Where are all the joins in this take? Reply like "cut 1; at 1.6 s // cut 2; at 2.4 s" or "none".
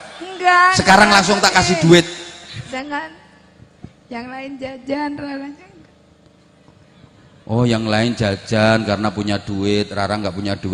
cut 1; at 2.7 s